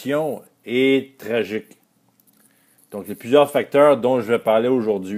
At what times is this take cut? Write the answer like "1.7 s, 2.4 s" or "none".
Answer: 3.6 s